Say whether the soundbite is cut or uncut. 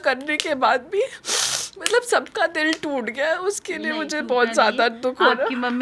uncut